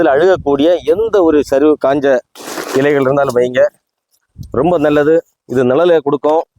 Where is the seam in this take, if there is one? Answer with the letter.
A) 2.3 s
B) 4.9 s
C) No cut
C